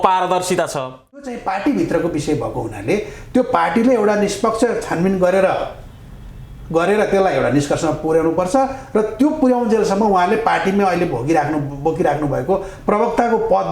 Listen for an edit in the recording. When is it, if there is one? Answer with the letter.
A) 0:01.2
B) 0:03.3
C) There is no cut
A